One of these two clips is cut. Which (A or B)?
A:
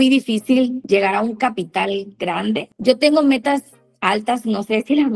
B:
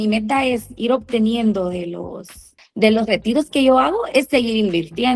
A